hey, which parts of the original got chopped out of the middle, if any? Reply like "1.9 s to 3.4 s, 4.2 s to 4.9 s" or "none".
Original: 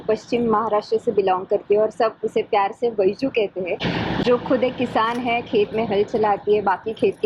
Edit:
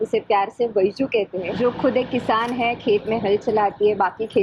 3.7 s to 4.2 s